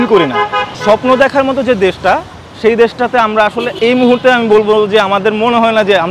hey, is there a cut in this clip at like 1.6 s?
no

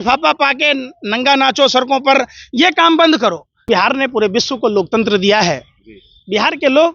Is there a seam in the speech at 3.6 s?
yes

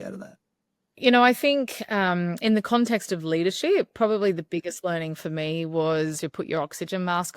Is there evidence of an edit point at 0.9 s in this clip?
yes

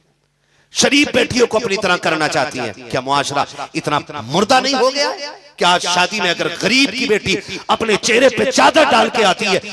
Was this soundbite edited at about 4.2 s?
no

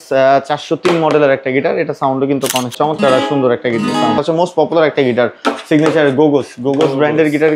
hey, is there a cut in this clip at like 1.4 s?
no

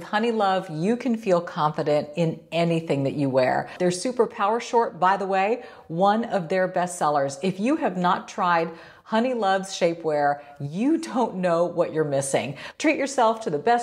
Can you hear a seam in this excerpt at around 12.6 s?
yes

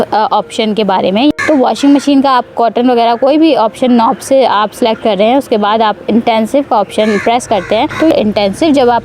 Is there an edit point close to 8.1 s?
yes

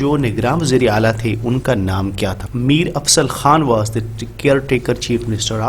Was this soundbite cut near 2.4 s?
yes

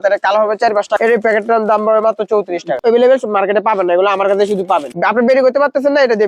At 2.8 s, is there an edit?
yes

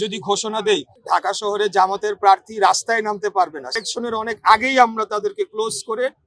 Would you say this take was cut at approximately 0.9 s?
yes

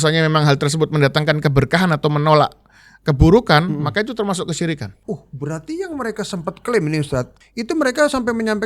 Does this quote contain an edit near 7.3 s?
yes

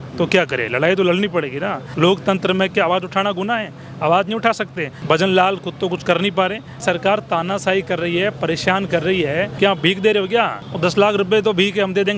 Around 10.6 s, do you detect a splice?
yes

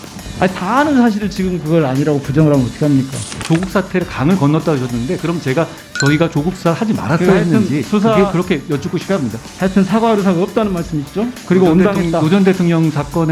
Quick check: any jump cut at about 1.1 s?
no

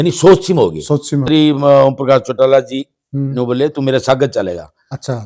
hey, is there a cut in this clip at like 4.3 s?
no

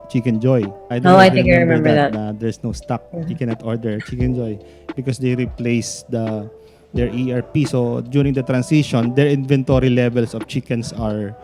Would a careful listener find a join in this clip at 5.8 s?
no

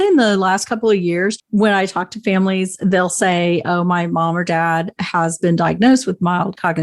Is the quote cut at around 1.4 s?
yes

